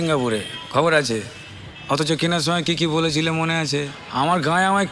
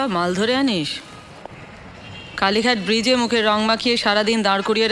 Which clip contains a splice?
first; 1 cut; at 4.0 s

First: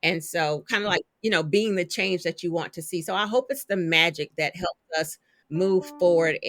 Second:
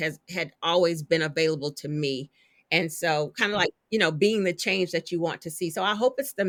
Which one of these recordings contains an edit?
first; 1 cut; at 5.4 s

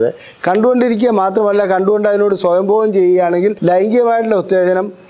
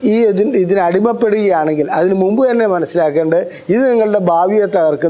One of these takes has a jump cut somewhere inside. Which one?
first; 1 cut; at 3.6 s

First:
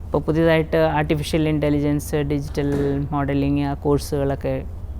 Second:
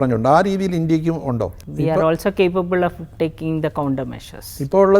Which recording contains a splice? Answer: second; 1 cut; at 1.6 s

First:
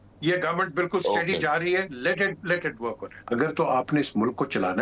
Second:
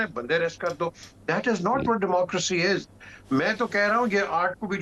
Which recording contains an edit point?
first; 1 cut; at 3.1 s

